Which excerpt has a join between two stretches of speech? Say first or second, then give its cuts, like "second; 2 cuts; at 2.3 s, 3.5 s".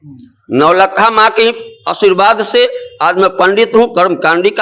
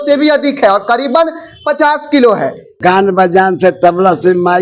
second; 1 cut; at 2.6 s